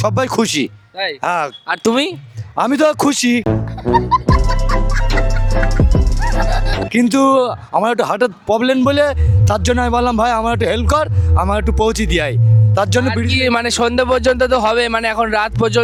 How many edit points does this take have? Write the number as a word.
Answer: zero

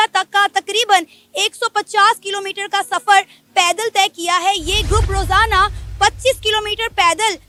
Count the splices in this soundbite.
zero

